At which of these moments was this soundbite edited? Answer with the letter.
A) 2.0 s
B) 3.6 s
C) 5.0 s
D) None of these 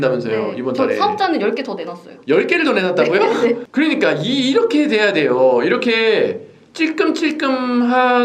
B